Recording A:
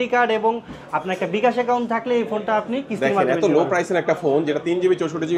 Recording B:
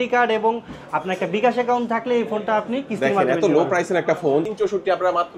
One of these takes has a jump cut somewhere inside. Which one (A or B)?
B